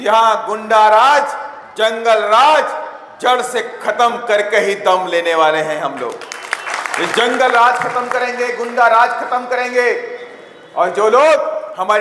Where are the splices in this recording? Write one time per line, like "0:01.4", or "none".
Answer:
none